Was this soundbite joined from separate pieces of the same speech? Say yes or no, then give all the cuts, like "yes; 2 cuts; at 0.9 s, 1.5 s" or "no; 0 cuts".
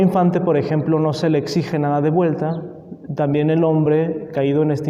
no; 0 cuts